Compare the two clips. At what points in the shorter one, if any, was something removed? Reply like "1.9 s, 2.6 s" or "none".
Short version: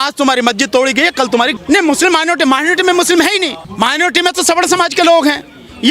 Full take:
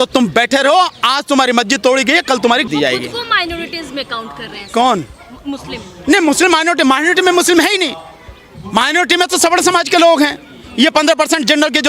1.6 s, 3.6 s